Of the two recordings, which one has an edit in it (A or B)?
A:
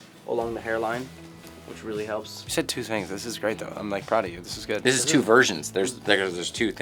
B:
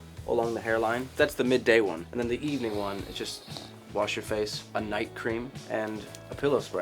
B